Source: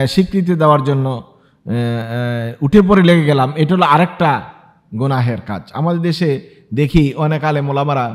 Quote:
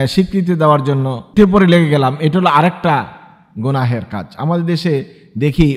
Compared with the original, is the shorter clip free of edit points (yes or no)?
no